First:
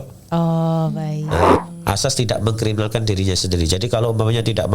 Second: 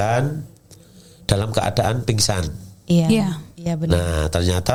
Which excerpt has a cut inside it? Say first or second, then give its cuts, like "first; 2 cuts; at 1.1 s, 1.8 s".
first; 1 cut; at 1.6 s